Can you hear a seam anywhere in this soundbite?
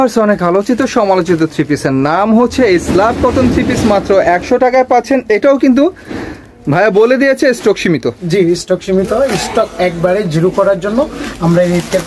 no; 0 cuts

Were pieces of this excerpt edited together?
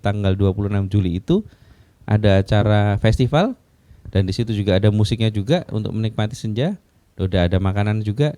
no; 0 cuts

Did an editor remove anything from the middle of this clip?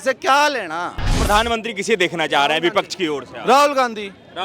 yes; 1 cut; at 1.2 s

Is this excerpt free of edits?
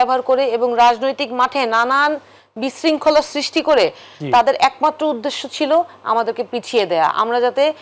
yes; 0 cuts

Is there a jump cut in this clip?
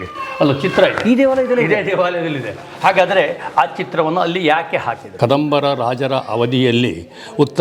yes; 1 cut; at 5.1 s

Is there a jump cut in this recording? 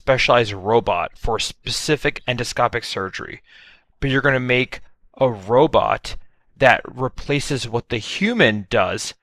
no; 0 cuts

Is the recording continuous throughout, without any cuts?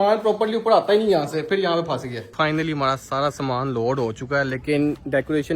no; 1 cut; at 2.2 s

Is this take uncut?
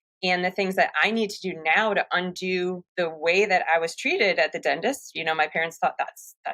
no; 1 cut; at 2.8 s

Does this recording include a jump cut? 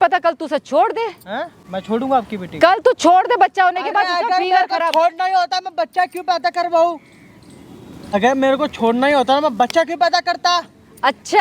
no; 0 cuts

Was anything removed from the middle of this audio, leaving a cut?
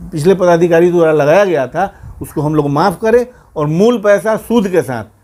no; 0 cuts

